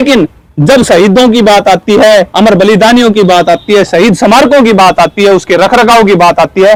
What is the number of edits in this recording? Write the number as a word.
zero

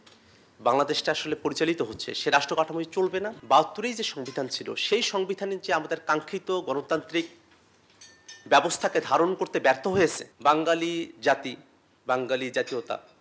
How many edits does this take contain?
two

